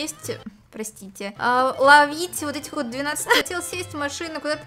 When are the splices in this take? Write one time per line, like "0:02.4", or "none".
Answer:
0:03.4